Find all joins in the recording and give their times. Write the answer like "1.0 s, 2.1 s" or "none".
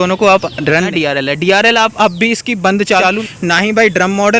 0.7 s, 3.0 s